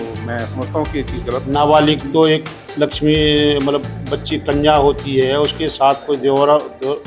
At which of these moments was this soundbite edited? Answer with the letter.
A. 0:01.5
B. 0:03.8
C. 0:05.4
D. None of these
A